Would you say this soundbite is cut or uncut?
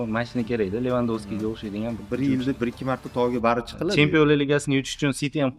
uncut